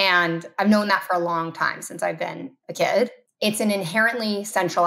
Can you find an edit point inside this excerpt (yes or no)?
yes